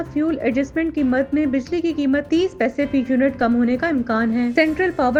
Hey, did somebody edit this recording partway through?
no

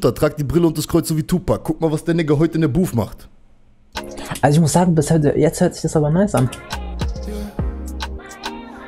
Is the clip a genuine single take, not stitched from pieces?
yes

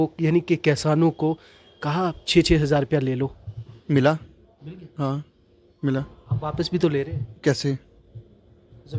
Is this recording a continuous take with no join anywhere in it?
yes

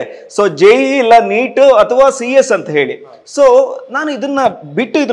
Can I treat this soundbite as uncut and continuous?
yes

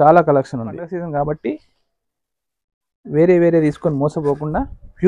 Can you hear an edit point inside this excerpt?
yes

